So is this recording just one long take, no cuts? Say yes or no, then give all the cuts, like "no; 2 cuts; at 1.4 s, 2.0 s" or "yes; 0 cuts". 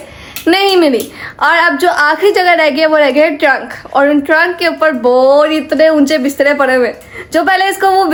yes; 0 cuts